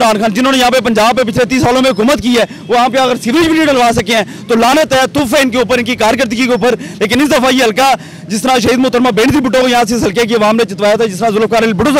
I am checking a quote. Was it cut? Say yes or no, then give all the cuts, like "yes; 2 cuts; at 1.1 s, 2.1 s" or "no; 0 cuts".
no; 0 cuts